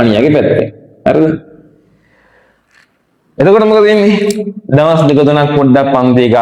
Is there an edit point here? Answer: no; 0 cuts

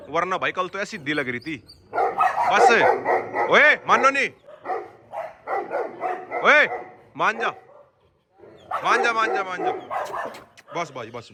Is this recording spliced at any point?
no; 0 cuts

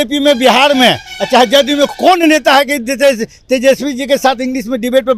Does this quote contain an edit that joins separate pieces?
no; 0 cuts

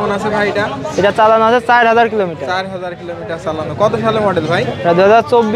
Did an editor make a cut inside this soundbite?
no; 0 cuts

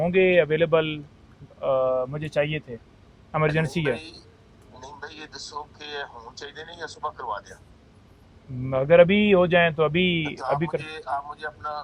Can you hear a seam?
no; 0 cuts

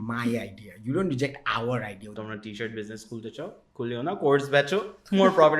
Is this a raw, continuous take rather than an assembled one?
no; 1 cut; at 2.2 s

